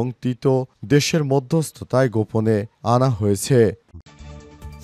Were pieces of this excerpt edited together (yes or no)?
yes